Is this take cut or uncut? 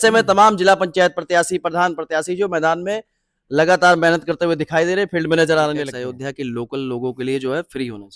cut